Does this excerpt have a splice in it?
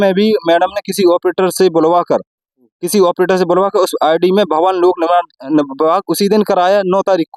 no; 0 cuts

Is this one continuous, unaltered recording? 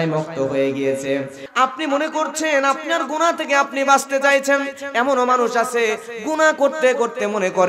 no; 1 cut; at 1.4 s

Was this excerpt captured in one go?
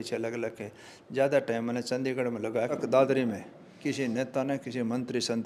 no; 1 cut; at 2.8 s

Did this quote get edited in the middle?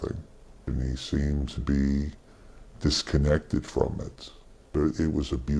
no; 0 cuts

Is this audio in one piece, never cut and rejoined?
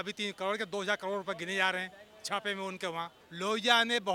no; 1 cut; at 3.2 s

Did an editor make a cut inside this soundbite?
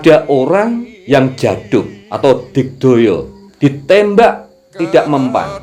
yes; 3 cuts; at 0.9 s, 2.0 s, 3.4 s

